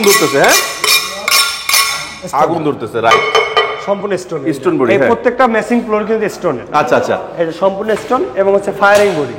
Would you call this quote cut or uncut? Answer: uncut